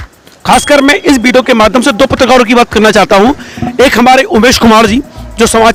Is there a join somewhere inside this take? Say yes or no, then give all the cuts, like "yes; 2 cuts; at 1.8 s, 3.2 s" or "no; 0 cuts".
no; 0 cuts